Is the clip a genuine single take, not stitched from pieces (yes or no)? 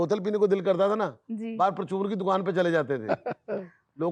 yes